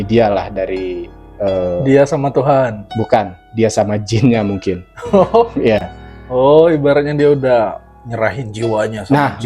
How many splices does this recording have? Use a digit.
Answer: 0